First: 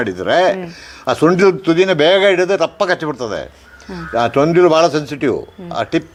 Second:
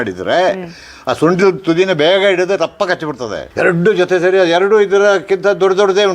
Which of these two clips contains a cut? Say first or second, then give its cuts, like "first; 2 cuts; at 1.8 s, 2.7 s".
second; 1 cut; at 3.4 s